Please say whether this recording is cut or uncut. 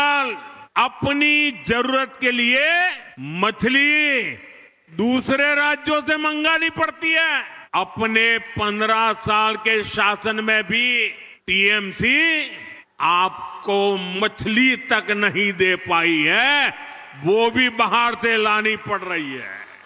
uncut